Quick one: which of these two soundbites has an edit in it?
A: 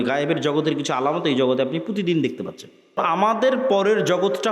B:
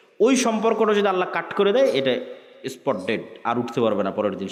A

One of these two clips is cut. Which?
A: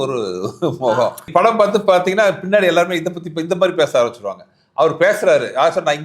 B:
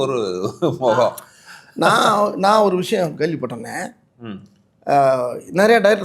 A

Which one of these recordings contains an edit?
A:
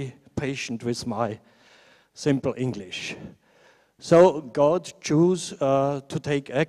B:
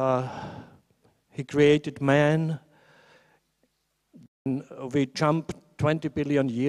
A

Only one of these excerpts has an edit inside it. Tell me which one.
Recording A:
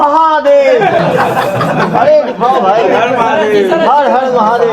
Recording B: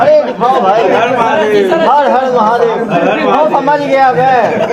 A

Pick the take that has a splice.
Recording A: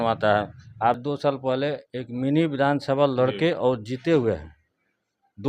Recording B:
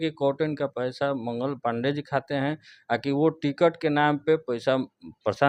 A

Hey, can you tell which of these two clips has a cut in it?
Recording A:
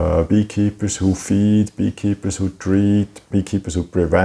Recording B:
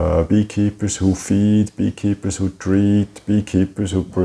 A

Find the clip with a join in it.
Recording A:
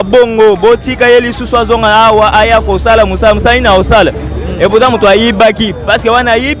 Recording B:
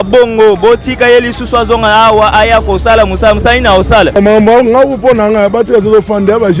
B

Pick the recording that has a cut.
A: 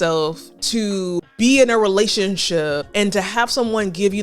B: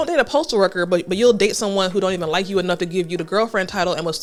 A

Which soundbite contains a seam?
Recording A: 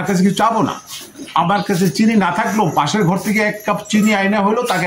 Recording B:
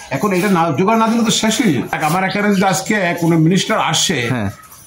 B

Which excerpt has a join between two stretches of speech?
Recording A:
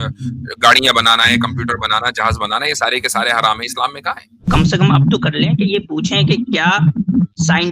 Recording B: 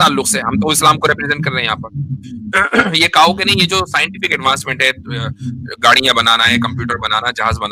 A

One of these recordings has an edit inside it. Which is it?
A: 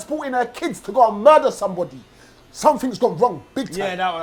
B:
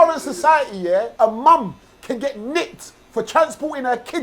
B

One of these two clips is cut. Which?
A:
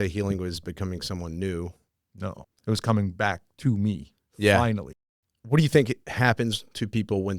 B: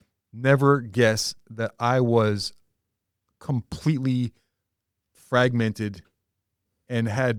A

